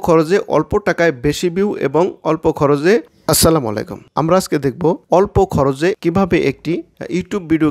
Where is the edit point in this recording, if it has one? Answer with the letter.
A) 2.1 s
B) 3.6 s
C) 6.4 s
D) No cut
A